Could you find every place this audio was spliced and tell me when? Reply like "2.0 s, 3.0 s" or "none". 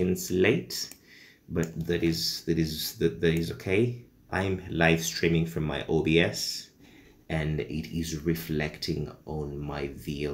4.2 s